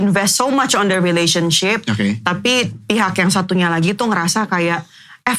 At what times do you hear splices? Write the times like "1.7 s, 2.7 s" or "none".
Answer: none